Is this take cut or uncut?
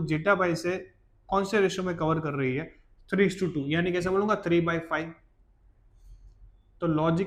uncut